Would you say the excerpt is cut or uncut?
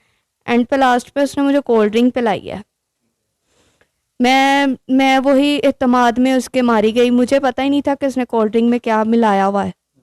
uncut